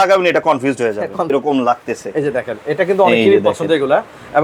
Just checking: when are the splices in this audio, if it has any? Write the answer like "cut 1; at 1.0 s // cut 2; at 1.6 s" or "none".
cut 1; at 1.3 s